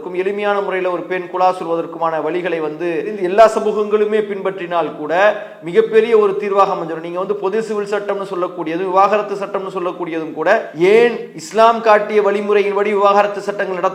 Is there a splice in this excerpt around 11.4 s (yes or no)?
no